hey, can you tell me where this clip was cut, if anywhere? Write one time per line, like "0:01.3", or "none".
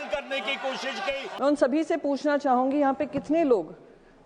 0:01.3